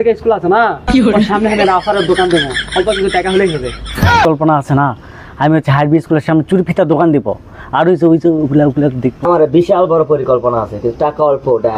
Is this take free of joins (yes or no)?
no